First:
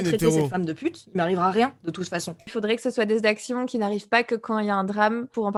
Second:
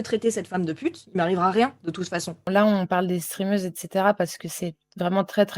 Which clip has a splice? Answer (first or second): second